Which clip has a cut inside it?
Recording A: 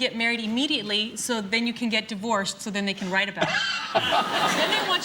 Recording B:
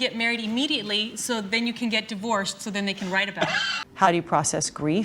B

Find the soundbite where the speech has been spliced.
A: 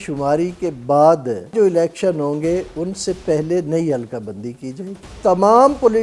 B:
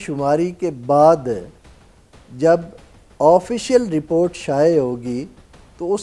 A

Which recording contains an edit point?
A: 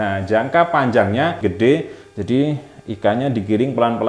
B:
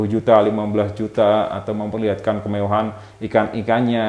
A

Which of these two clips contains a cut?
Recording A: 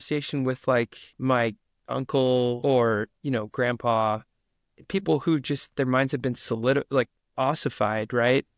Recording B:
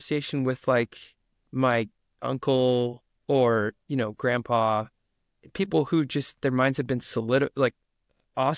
A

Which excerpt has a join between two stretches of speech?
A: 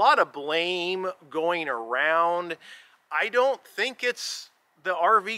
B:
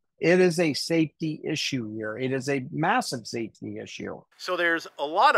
B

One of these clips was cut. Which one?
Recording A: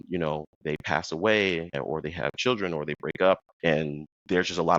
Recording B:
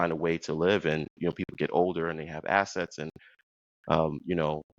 A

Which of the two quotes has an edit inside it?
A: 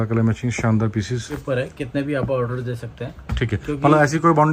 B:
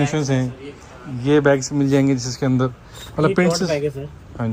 A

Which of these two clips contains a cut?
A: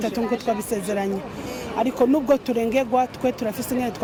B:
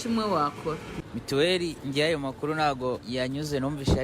B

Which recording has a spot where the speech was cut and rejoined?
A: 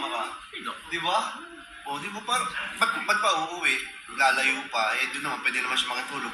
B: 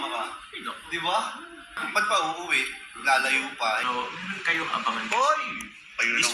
B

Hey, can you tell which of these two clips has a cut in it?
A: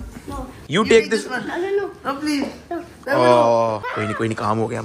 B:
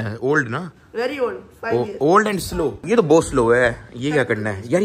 B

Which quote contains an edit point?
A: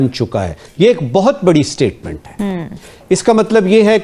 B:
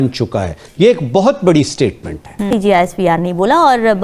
B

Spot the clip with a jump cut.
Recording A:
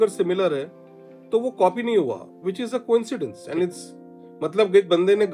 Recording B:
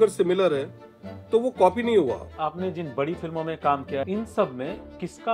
B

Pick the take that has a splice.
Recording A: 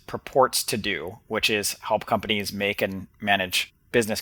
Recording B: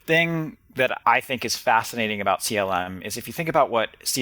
B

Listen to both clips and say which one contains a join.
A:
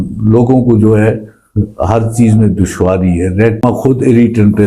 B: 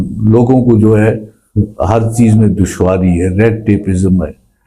A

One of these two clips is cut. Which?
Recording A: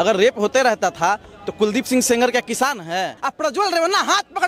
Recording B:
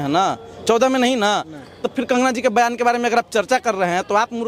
A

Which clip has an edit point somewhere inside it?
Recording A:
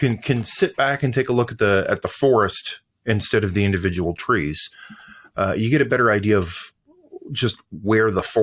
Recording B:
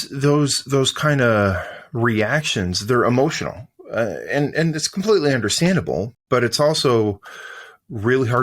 B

